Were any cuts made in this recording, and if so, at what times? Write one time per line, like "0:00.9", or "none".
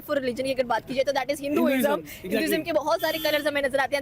none